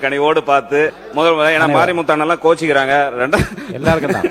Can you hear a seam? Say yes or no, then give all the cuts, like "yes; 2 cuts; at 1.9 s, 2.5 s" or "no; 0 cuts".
yes; 1 cut; at 0.9 s